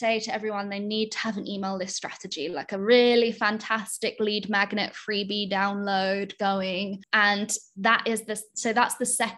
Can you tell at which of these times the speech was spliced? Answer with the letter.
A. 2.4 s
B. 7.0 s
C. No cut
B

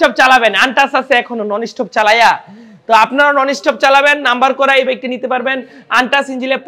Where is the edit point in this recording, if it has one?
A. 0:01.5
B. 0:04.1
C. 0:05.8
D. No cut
D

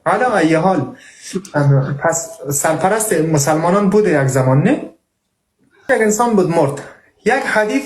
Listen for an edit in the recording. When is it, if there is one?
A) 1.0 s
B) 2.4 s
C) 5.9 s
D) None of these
C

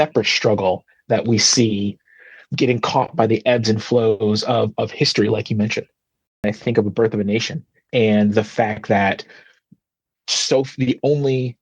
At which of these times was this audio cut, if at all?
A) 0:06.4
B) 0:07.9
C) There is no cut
A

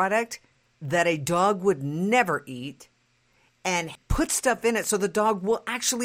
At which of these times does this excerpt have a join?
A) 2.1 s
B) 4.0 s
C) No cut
B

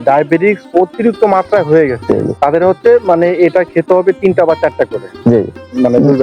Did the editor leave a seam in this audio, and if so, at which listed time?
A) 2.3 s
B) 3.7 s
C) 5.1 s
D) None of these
A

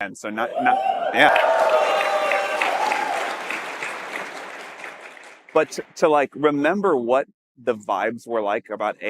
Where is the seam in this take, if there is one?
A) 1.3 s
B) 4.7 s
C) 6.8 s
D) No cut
A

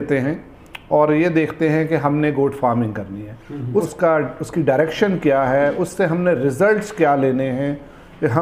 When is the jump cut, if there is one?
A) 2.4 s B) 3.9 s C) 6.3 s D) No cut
B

